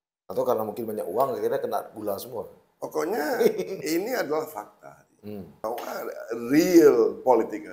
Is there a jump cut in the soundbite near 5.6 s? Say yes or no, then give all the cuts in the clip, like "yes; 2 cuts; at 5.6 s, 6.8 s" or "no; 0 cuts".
yes; 1 cut; at 5.6 s